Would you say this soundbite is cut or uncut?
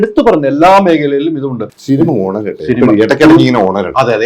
cut